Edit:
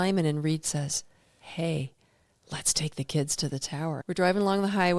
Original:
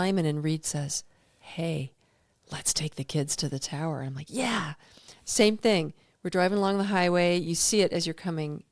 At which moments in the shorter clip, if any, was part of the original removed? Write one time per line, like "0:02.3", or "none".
0:04.0

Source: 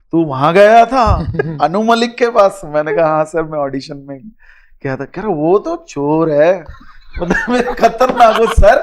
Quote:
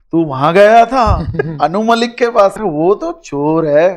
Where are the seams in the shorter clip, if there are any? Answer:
0:02.6

